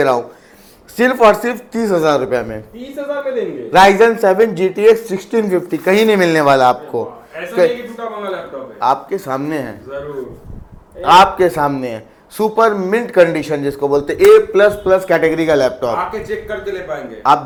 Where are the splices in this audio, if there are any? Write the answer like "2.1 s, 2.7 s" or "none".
none